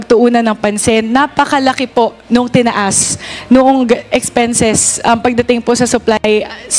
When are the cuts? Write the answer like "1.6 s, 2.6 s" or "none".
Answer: none